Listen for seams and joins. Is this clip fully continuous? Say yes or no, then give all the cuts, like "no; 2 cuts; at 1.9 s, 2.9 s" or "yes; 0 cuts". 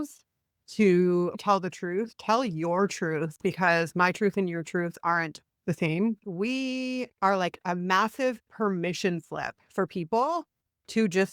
no; 2 cuts; at 1.4 s, 6.2 s